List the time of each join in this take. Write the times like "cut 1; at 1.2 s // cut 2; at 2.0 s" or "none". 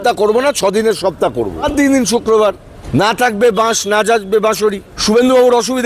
cut 1; at 1.6 s // cut 2; at 2.7 s // cut 3; at 4.9 s